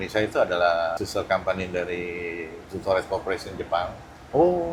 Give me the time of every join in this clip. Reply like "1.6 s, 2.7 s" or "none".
1.0 s